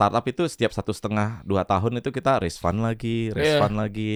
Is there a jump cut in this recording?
no; 0 cuts

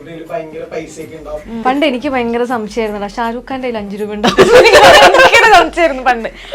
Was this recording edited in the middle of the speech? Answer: yes; 1 cut; at 1.6 s

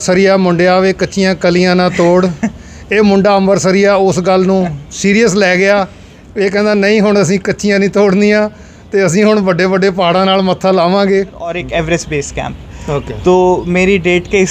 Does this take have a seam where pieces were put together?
yes; 1 cut; at 11.6 s

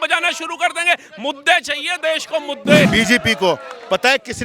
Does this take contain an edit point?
yes; 1 cut; at 2.9 s

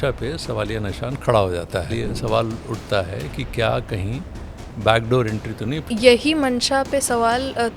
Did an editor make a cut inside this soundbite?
yes; 2 cuts; at 1.9 s, 5.9 s

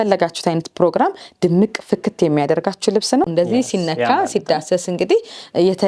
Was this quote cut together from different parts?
yes; 1 cut; at 3.3 s

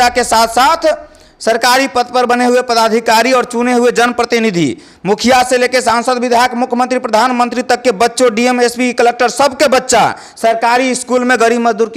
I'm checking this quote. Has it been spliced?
no; 0 cuts

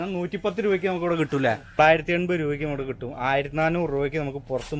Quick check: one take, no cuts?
no; 1 cut; at 1.8 s

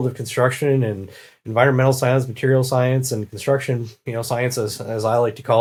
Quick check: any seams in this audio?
no; 0 cuts

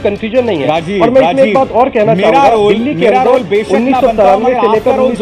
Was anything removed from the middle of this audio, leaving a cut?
no; 0 cuts

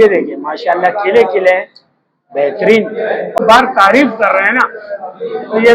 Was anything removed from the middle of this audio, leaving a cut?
yes; 1 cut; at 3.4 s

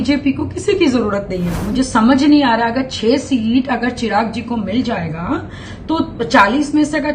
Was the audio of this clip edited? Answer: yes; 1 cut; at 1.6 s

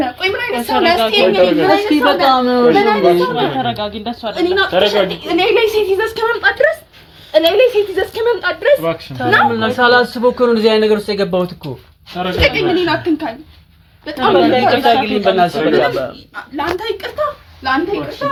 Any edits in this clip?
no; 0 cuts

